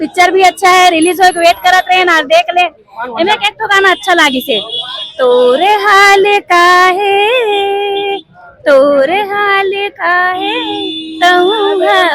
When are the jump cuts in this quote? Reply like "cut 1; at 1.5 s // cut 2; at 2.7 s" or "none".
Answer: none